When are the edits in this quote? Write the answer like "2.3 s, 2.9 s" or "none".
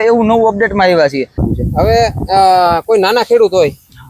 1.5 s